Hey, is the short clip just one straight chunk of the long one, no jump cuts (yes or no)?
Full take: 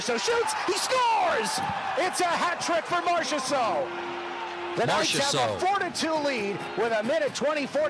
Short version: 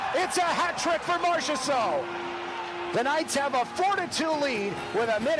yes